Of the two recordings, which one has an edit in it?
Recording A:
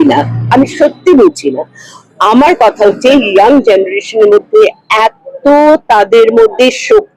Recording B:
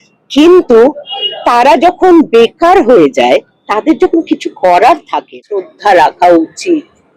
B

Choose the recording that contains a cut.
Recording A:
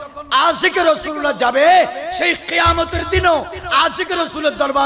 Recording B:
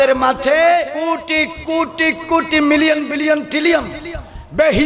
B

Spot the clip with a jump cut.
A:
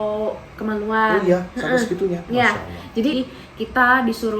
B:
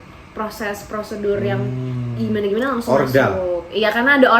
A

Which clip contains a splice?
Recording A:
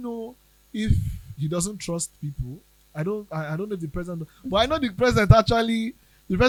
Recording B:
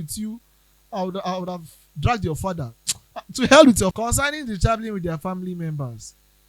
B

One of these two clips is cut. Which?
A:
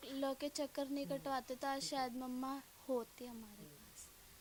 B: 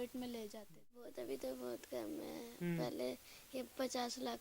B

